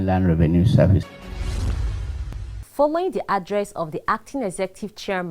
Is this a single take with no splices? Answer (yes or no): yes